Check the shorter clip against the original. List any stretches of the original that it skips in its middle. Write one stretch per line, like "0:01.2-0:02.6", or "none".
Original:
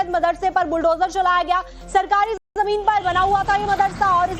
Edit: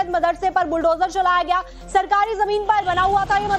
0:02.3-0:02.5